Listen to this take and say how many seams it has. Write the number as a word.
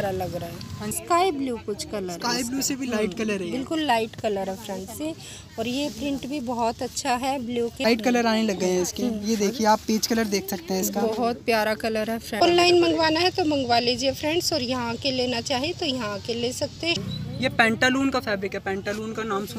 four